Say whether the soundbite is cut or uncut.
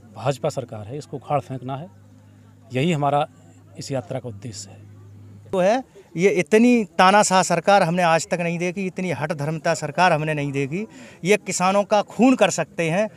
cut